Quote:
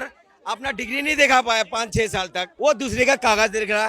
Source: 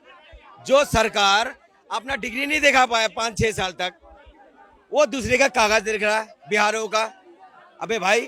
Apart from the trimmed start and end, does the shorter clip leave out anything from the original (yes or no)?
yes